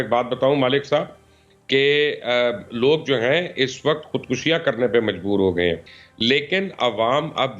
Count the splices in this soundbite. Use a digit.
0